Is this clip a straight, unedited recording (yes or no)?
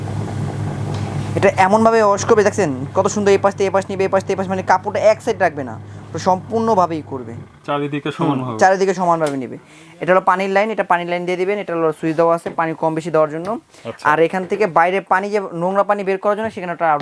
yes